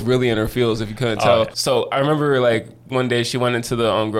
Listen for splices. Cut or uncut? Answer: cut